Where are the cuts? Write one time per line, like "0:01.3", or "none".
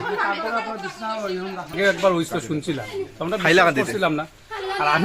0:01.7